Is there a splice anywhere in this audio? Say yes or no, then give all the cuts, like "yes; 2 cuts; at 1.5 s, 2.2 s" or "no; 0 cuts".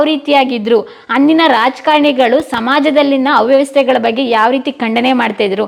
no; 0 cuts